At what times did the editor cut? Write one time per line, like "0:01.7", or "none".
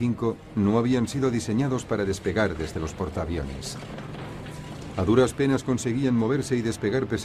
0:03.0